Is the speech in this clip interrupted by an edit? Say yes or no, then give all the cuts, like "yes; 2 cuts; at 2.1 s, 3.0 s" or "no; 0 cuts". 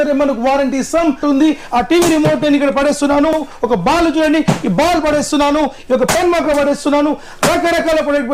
yes; 2 cuts; at 1.2 s, 3.3 s